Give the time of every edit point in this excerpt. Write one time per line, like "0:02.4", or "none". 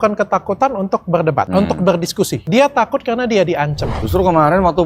0:01.5
0:02.4
0:03.9